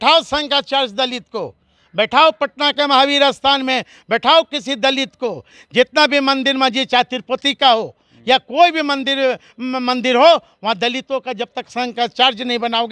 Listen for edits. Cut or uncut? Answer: uncut